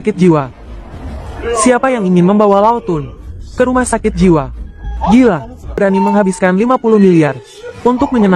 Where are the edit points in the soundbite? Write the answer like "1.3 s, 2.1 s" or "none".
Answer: 5.8 s